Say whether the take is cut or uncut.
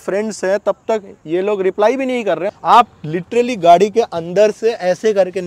cut